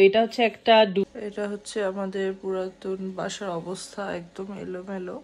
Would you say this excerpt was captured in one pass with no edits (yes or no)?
no